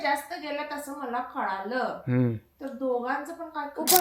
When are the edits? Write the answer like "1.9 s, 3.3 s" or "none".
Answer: none